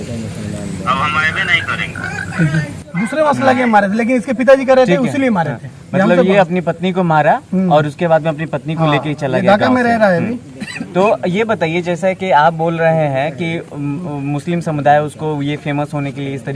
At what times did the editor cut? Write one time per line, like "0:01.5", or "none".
none